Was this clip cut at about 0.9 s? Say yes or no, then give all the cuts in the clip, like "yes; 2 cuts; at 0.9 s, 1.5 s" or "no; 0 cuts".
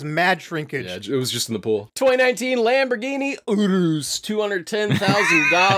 yes; 2 cuts; at 0.9 s, 1.9 s